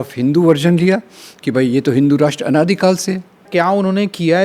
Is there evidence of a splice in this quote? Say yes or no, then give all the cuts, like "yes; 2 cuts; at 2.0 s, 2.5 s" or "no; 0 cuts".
yes; 1 cut; at 3.4 s